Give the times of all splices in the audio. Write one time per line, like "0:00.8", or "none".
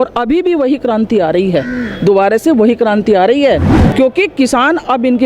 0:03.7